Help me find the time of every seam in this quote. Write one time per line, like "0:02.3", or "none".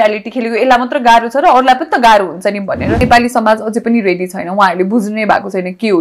0:03.0